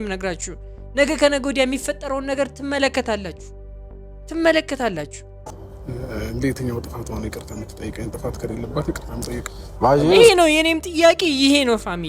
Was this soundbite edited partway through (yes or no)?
yes